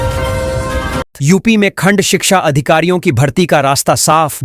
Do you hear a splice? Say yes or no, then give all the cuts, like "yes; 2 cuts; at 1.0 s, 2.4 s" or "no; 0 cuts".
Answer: yes; 1 cut; at 0.9 s